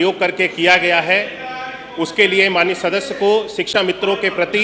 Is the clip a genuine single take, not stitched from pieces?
no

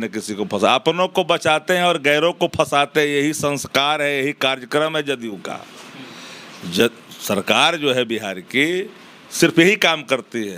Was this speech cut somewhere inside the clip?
no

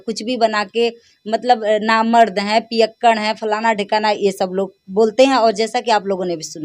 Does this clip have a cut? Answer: no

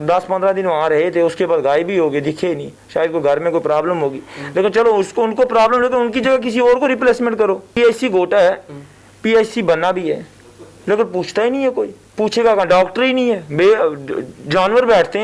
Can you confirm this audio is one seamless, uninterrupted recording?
no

